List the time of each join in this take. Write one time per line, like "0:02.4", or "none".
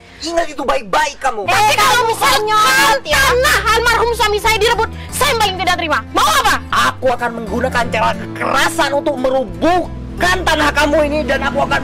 0:01.4
0:06.6